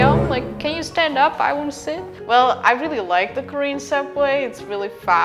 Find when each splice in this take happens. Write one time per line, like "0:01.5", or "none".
none